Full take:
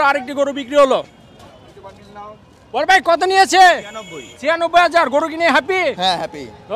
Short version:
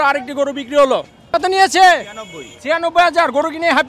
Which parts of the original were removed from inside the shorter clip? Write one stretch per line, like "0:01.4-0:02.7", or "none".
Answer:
0:01.3-0:03.1